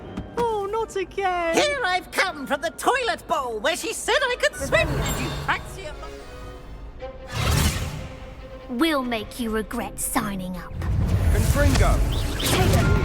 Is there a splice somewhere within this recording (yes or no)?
yes